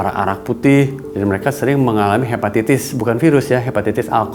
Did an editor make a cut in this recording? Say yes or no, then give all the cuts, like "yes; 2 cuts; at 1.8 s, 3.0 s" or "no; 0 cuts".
yes; 1 cut; at 1.0 s